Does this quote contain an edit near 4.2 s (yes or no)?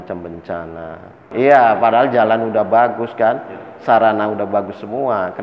no